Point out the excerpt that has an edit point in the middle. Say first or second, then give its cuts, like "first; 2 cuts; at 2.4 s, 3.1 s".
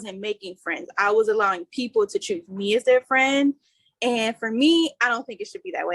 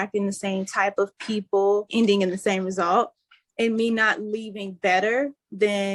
second; 1 cut; at 1.9 s